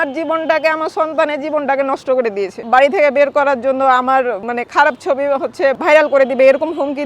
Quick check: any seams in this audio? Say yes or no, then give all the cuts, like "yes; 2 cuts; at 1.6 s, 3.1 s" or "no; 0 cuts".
yes; 3 cuts; at 2.6 s, 4.5 s, 5.8 s